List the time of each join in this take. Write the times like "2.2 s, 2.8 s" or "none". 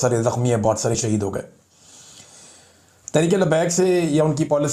none